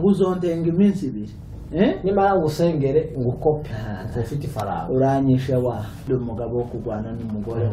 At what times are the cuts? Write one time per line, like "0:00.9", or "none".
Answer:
0:06.0